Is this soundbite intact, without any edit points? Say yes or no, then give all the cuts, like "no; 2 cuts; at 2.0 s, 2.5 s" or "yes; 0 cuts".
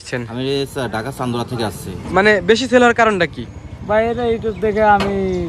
no; 1 cut; at 2.0 s